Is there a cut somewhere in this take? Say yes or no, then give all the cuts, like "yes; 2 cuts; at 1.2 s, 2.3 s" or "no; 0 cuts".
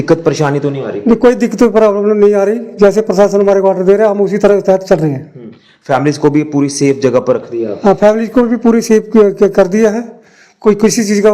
no; 0 cuts